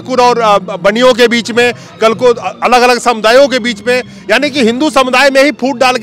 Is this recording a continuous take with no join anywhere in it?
yes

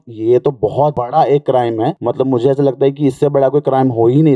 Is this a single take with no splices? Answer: no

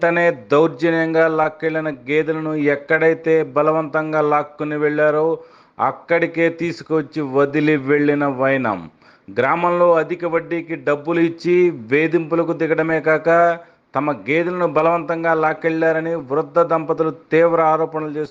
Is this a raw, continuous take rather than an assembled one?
yes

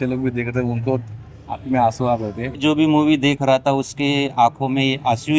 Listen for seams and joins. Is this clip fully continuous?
no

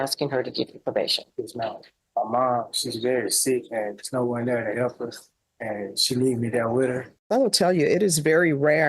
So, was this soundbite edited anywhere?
yes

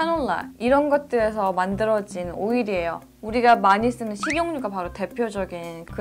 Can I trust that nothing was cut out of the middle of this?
yes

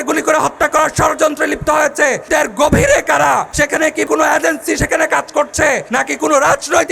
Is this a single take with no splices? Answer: no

